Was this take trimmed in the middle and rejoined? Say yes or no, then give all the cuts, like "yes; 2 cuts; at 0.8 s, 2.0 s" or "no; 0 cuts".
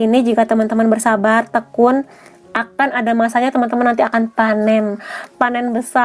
no; 0 cuts